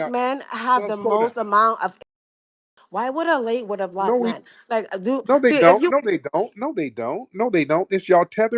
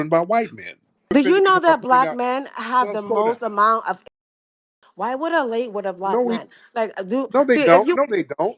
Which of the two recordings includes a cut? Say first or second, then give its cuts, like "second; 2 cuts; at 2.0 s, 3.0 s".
second; 1 cut; at 1.1 s